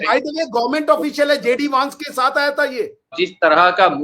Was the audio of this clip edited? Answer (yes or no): yes